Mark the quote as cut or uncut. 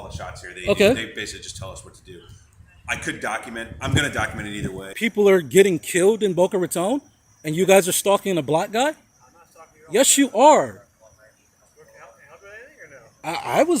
cut